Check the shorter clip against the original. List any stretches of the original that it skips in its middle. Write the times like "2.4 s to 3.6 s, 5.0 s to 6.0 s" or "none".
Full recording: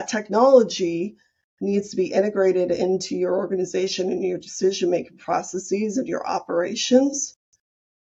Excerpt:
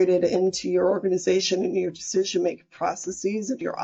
none